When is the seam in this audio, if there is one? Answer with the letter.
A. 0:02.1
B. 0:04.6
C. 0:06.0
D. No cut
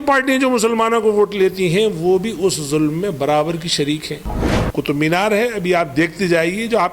B